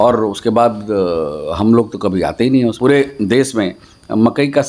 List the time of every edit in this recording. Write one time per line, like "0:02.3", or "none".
0:02.8